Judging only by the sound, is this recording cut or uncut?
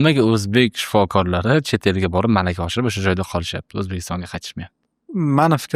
uncut